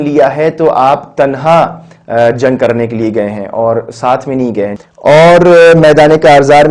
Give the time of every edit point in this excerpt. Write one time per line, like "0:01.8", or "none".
0:04.7